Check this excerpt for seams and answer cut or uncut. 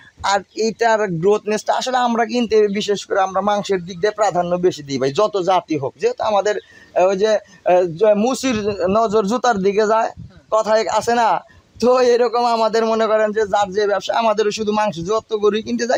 uncut